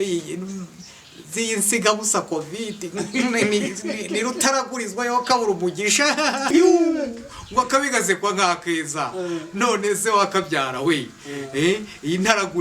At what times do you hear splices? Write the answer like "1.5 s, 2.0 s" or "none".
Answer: 6.5 s